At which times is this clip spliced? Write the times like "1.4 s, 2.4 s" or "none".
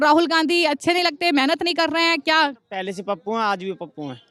none